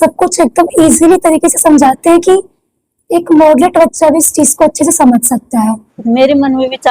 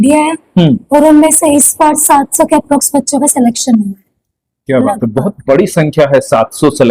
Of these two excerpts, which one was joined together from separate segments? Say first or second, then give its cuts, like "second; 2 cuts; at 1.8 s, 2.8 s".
first; 1 cut; at 5.9 s